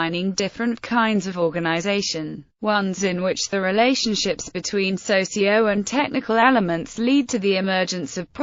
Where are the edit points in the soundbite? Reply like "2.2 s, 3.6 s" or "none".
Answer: none